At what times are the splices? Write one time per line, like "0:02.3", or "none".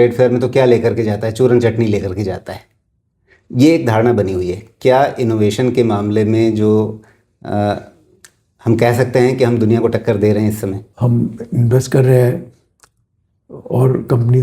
0:10.9